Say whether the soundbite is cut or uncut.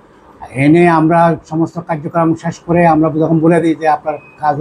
uncut